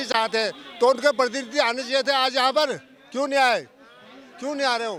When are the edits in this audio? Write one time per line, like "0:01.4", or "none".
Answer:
none